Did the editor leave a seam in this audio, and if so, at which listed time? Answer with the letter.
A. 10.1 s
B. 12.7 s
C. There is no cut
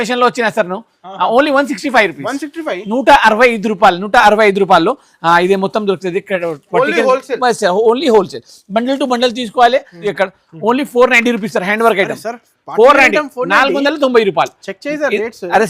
A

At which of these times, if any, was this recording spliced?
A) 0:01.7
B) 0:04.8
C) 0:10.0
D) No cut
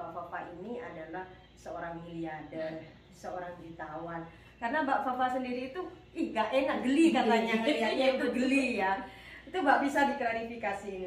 D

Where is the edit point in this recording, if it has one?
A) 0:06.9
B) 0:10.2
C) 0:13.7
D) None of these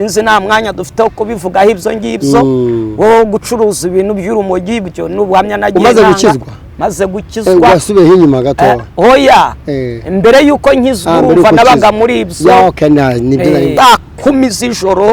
C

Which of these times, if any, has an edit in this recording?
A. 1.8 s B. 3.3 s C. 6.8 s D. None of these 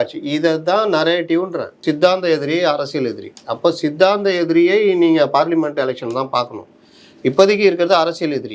A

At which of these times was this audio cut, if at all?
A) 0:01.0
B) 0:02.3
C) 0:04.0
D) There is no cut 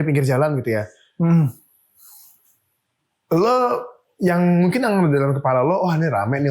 D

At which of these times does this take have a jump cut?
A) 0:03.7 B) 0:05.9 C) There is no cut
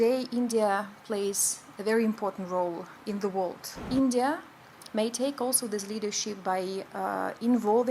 A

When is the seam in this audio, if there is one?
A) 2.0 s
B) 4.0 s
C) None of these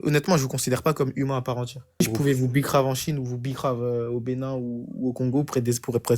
A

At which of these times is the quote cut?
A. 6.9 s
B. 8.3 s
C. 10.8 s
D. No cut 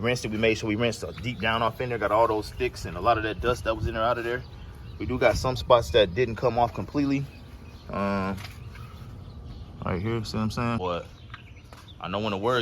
C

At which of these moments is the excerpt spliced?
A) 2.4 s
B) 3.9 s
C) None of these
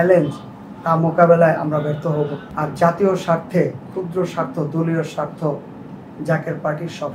A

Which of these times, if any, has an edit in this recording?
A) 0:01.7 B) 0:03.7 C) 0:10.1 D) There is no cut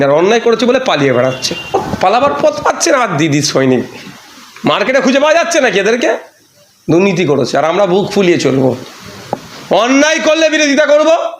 A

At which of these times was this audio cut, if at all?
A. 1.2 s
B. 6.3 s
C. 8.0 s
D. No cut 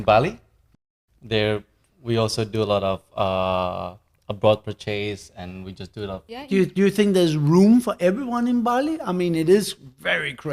B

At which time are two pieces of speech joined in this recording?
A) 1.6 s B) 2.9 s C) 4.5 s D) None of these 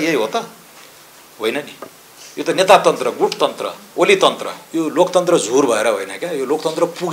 C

